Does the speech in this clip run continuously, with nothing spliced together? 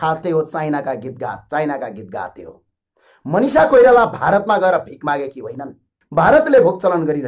no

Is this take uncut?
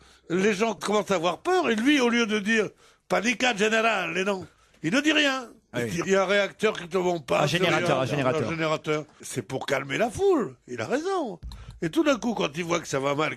yes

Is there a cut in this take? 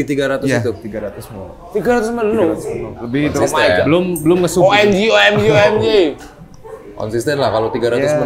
no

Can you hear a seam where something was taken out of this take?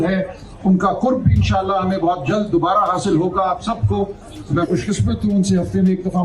no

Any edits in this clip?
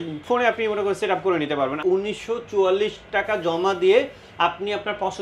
yes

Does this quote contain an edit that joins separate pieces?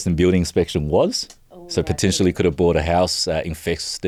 no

